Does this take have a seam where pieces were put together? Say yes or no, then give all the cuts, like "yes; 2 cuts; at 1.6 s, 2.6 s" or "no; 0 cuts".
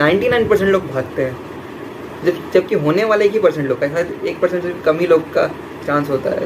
no; 0 cuts